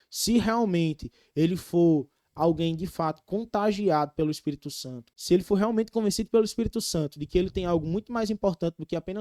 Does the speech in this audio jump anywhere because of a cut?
yes; 1 cut; at 5.1 s

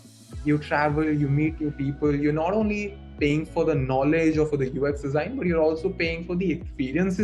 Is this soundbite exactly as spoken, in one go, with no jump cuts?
yes; 0 cuts

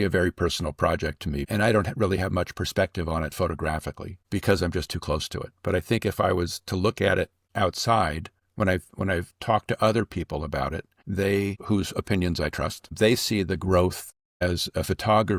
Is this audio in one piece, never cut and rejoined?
no; 1 cut; at 1.4 s

